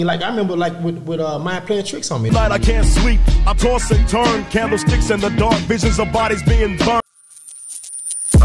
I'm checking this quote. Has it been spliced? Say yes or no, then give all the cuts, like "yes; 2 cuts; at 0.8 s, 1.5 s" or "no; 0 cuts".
yes; 1 cut; at 7.0 s